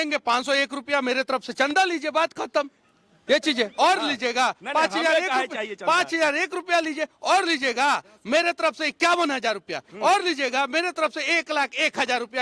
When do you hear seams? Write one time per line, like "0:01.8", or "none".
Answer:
none